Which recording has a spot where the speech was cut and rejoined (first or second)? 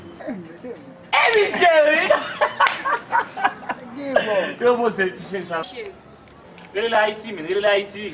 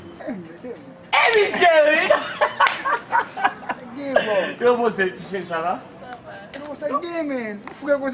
second